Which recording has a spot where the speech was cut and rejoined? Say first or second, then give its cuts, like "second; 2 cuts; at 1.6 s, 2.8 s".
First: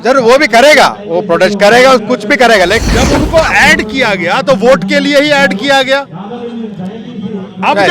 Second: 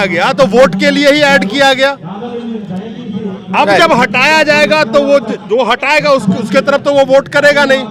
first; 1 cut; at 2.8 s